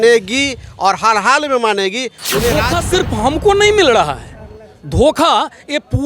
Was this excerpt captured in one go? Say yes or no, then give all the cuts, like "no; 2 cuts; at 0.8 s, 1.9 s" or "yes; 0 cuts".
no; 1 cut; at 2.7 s